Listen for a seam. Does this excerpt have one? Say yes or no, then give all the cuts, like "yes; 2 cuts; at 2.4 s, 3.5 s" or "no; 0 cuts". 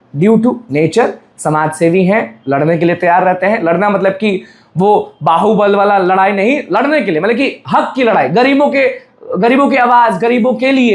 no; 0 cuts